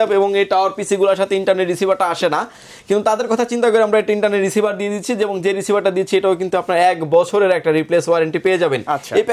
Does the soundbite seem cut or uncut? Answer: uncut